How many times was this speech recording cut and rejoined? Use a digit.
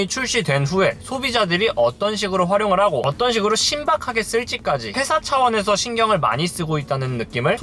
0